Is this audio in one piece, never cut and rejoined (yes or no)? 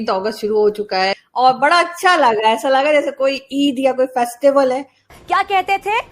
no